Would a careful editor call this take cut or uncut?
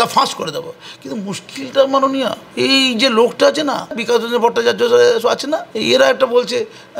cut